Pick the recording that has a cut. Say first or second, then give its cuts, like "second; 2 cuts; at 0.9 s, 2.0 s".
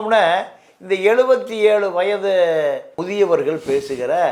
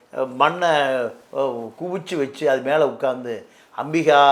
first; 1 cut; at 2.9 s